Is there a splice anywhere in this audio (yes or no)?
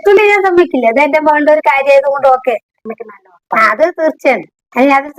yes